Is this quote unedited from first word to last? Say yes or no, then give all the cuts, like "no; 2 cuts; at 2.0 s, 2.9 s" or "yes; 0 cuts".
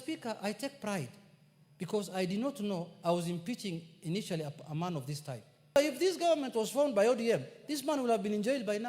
no; 1 cut; at 5.8 s